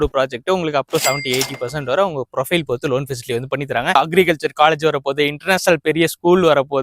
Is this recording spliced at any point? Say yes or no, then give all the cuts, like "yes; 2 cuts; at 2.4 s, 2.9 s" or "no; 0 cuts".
yes; 1 cut; at 4.0 s